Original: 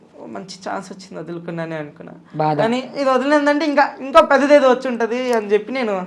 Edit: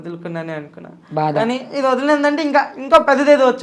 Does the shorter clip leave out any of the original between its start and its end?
no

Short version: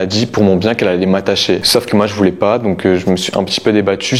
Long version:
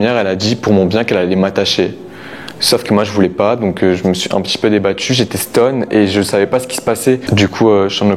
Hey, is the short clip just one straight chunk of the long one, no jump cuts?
no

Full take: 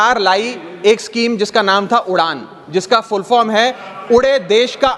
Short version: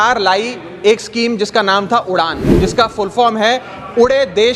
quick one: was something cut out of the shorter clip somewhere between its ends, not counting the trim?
yes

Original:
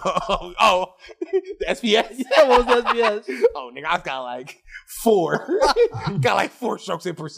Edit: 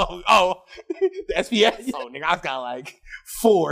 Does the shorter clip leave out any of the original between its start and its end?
yes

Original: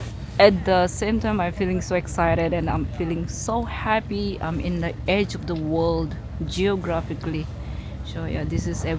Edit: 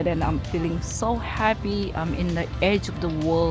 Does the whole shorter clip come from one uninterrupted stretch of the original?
yes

